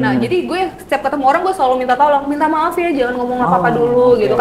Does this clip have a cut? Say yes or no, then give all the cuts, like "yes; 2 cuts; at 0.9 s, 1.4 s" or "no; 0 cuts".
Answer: no; 0 cuts